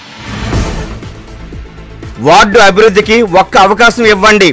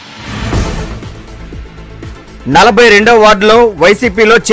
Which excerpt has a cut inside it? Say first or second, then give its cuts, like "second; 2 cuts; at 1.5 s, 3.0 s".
first; 1 cut; at 2.1 s